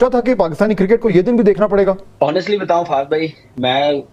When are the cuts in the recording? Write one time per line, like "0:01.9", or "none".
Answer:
0:02.1